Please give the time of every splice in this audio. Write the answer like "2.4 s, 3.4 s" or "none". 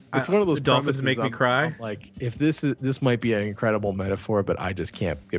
none